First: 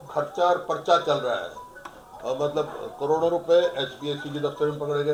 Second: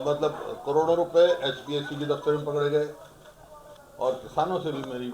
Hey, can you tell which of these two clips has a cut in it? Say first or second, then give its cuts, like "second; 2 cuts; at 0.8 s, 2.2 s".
second; 1 cut; at 3.7 s